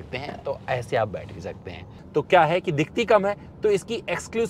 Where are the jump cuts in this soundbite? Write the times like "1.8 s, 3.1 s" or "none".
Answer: 1.9 s